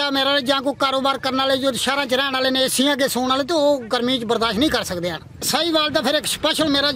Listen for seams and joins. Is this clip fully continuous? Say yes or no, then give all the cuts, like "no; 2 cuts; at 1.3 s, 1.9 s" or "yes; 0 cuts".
no; 1 cut; at 5.5 s